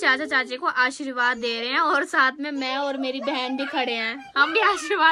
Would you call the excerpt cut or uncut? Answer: uncut